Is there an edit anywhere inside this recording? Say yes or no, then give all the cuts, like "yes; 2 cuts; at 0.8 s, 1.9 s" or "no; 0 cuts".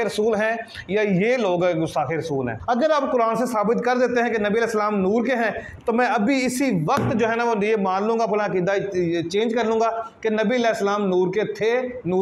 yes; 1 cut; at 2.6 s